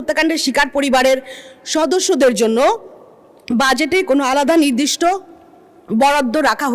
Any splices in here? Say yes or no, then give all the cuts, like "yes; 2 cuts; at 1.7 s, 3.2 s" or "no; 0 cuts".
no; 0 cuts